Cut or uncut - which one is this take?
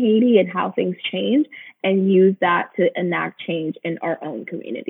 uncut